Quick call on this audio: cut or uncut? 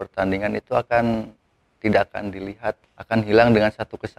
cut